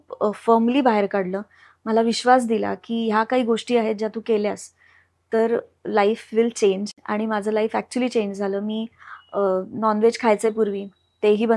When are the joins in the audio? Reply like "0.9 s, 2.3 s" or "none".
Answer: none